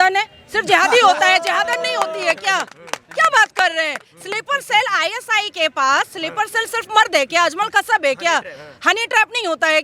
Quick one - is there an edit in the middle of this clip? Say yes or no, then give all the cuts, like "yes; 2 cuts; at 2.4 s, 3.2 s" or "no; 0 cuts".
no; 0 cuts